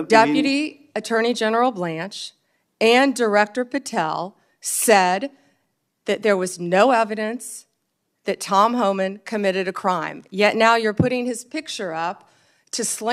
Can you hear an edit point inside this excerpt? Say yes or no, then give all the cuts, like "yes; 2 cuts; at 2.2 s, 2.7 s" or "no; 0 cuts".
no; 0 cuts